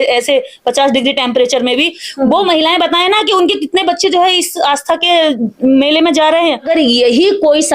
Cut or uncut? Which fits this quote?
cut